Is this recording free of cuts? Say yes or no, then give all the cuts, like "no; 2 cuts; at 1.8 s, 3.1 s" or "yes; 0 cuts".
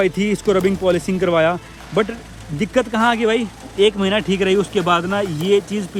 yes; 0 cuts